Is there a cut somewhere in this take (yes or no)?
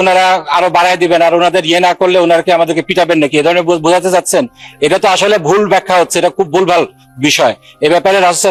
no